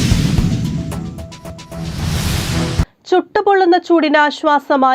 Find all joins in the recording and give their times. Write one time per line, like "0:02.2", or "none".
0:01.7